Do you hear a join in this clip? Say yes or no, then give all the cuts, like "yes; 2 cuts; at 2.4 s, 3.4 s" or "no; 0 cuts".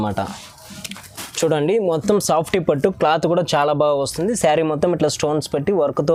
no; 0 cuts